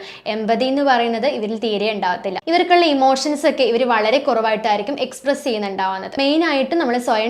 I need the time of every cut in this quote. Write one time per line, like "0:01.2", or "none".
0:06.1